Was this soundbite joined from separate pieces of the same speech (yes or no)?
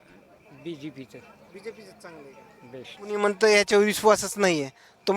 yes